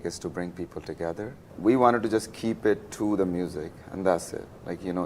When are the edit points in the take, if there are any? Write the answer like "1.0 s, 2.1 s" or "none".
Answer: 1.5 s